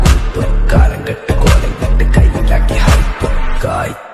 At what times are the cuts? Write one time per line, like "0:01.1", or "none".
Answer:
0:02.8

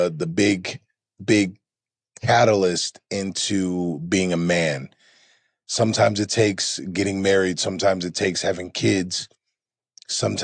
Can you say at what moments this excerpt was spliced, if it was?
none

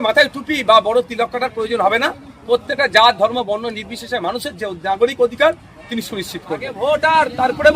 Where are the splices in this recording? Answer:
0:06.7

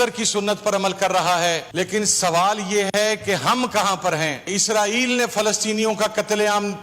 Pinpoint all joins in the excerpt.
0:01.7
0:04.5

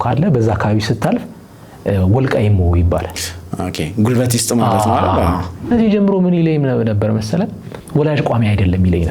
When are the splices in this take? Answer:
0:05.7

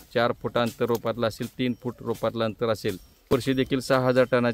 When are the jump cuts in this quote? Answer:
0:03.3

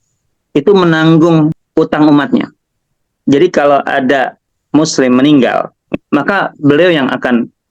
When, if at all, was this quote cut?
0:01.6
0:04.4
0:05.9

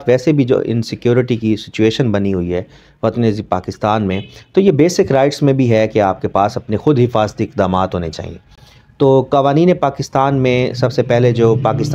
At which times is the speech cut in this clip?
none

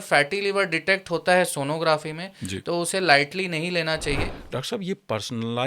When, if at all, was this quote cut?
0:04.3

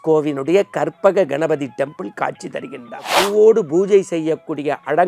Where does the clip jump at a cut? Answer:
0:03.1

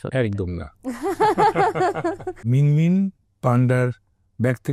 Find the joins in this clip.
0:02.4

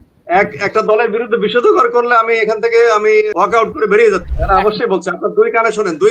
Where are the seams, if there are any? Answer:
0:03.3
0:04.3

